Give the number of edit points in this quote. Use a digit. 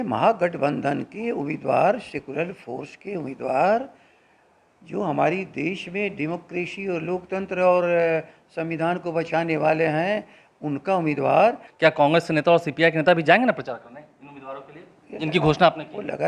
1